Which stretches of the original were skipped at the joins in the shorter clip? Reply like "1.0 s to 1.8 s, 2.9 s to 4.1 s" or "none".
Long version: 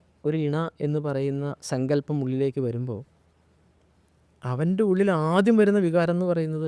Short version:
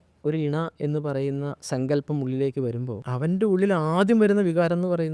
3.0 s to 4.4 s